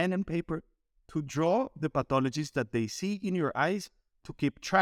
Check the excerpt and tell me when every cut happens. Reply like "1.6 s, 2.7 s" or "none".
none